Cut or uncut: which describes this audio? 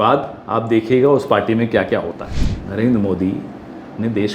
cut